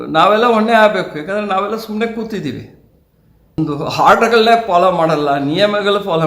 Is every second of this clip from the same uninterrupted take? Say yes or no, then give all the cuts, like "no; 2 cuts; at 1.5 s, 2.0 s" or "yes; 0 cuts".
no; 1 cut; at 3.5 s